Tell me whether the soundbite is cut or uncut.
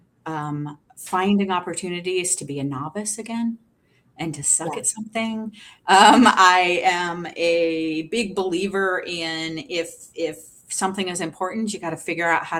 uncut